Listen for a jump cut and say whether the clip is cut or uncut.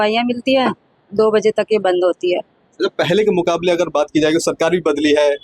uncut